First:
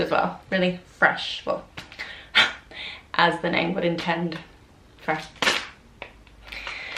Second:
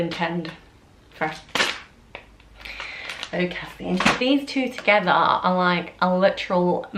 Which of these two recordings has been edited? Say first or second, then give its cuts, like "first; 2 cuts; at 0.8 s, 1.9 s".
second; 1 cut; at 4.2 s